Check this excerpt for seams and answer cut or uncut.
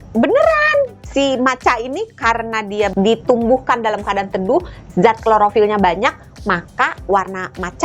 cut